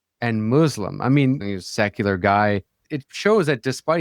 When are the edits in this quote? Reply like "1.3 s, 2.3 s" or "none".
1.4 s, 2.9 s